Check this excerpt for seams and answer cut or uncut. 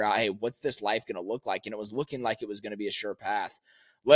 uncut